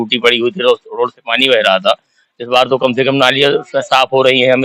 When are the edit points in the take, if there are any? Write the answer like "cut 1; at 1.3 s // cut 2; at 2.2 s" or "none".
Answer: none